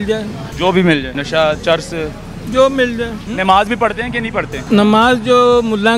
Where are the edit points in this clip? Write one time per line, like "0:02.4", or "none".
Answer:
0:01.2
0:03.2
0:04.6